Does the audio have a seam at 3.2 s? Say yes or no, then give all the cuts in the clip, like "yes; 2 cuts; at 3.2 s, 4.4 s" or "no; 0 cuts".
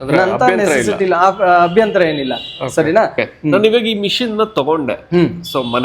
yes; 1 cut; at 3.2 s